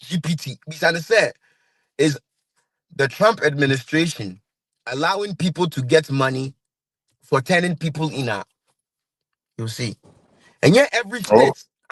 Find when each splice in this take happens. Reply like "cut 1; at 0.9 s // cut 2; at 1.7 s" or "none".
none